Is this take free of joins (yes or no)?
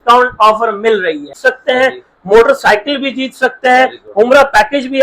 no